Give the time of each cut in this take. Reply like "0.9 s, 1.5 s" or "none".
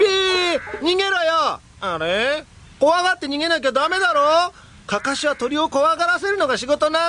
none